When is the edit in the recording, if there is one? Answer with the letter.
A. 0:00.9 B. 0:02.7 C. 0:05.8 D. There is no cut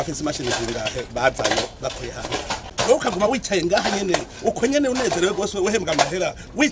B